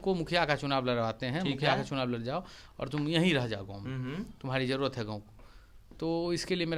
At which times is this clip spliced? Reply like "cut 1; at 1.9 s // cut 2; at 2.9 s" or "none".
none